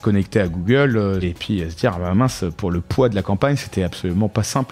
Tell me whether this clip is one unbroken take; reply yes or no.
no